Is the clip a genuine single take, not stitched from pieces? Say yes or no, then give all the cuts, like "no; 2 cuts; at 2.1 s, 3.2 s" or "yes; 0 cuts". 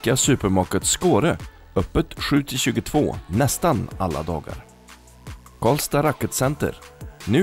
yes; 0 cuts